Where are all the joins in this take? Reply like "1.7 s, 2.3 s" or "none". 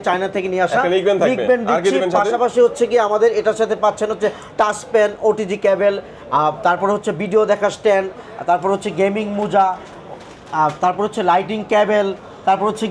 none